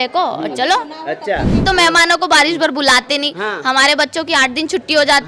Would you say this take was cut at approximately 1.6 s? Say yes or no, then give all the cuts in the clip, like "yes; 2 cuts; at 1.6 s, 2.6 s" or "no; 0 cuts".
yes; 1 cut; at 1.6 s